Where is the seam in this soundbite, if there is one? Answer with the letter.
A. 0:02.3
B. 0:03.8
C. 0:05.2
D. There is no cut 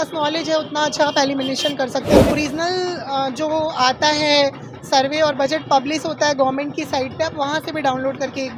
A